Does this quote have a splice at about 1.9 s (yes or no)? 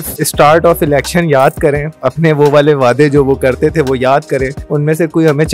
no